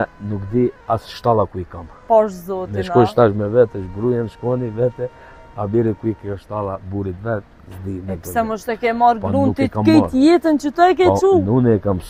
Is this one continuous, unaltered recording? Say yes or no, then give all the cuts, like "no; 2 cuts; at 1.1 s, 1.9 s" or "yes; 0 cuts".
yes; 0 cuts